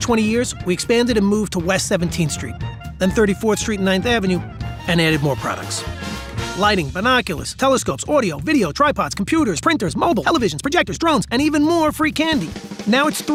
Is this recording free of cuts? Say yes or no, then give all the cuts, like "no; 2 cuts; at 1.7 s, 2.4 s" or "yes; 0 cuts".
yes; 0 cuts